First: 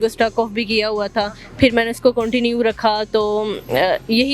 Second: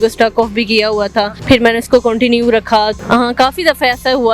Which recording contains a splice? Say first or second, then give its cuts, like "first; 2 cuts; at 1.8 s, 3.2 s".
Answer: second; 2 cuts; at 1.4 s, 2.9 s